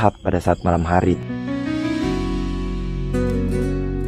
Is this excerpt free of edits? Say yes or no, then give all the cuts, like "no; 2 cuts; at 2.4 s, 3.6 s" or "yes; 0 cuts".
yes; 0 cuts